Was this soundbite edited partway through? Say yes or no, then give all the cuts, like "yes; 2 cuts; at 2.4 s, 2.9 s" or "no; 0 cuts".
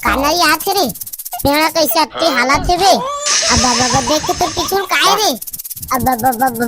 no; 0 cuts